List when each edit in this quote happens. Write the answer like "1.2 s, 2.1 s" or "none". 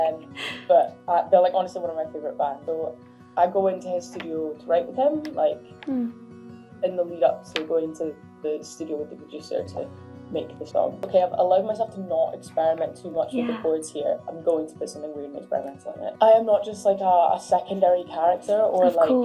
2.6 s, 11.0 s, 16.2 s